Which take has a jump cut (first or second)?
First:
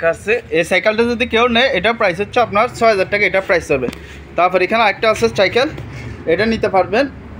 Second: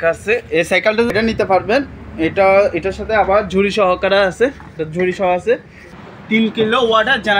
second